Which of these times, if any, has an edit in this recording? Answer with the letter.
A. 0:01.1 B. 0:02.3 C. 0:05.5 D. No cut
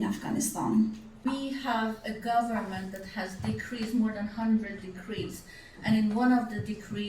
A